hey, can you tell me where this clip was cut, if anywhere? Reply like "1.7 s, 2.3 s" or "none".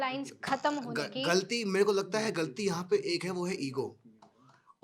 none